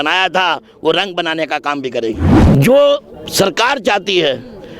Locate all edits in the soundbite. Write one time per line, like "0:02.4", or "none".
0:02.3